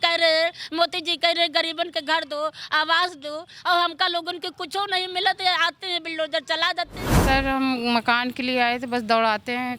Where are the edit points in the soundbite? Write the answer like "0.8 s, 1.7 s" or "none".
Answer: 7.0 s